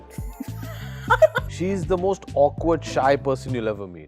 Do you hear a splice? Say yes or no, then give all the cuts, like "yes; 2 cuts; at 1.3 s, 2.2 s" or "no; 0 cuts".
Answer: yes; 1 cut; at 1.5 s